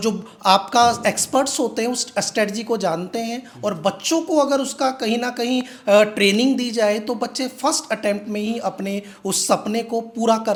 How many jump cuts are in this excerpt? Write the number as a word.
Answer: zero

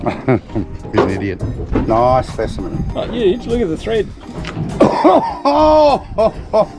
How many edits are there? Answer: two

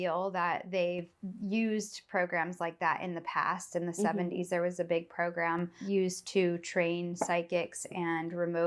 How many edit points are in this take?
one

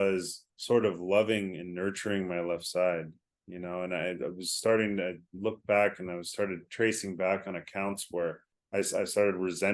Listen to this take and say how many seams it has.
one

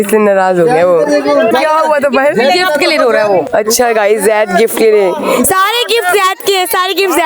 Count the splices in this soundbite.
zero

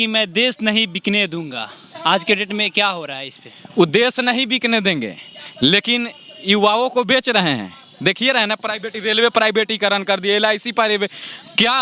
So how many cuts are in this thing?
zero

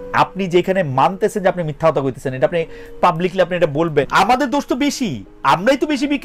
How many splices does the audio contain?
one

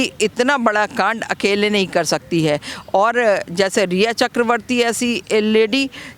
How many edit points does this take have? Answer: zero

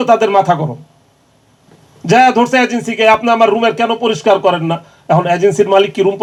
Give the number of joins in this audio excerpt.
zero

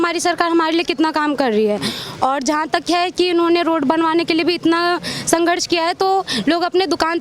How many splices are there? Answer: zero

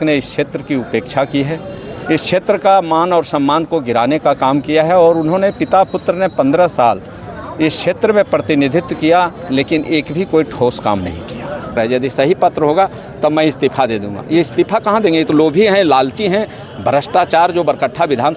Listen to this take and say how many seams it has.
one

